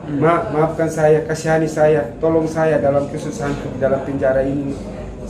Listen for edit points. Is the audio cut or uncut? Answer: uncut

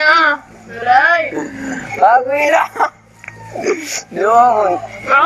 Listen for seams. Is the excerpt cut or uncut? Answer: cut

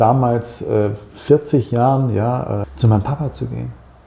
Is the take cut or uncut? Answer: cut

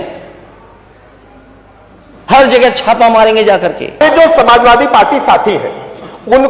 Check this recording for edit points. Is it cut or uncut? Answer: cut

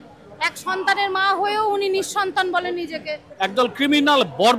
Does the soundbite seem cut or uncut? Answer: cut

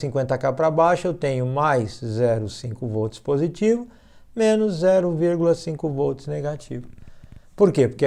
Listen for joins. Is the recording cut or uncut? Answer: uncut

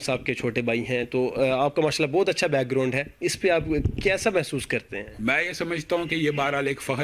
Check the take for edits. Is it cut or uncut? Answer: uncut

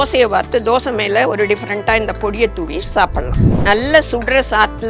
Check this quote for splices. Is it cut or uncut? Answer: cut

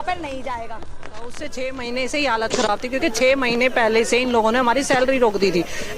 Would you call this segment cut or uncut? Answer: cut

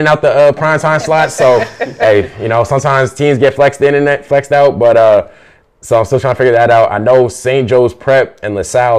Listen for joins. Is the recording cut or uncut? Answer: uncut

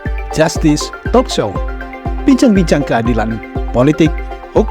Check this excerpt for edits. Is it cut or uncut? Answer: uncut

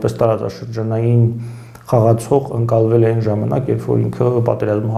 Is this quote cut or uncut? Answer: uncut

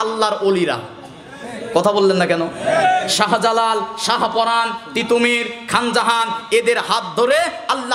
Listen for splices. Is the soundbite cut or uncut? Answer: uncut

